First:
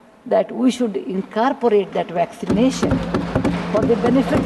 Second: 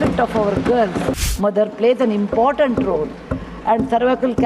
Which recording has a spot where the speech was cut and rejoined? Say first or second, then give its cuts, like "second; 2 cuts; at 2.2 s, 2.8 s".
second; 1 cut; at 1.2 s